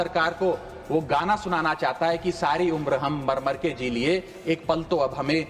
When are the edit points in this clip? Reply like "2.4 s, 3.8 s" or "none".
none